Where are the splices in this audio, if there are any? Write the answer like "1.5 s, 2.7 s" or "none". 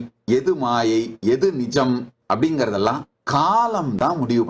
2.1 s, 3.1 s